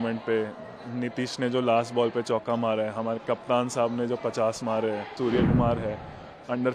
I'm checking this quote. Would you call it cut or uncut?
cut